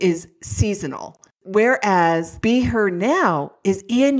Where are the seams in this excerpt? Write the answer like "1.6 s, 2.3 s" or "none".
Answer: 2.3 s